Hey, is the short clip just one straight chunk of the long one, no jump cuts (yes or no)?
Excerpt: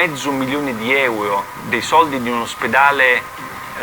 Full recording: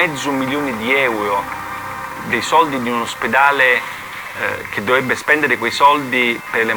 no